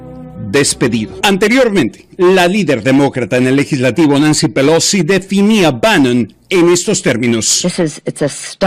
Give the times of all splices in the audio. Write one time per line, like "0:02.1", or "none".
0:06.5